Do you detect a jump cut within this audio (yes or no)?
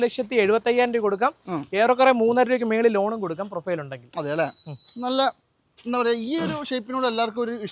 no